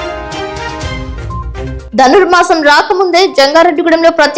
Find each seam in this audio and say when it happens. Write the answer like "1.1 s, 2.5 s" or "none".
1.1 s